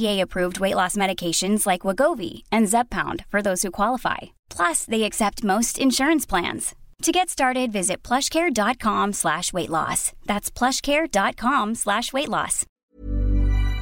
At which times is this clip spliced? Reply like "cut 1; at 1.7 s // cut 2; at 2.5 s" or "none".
cut 1; at 12.7 s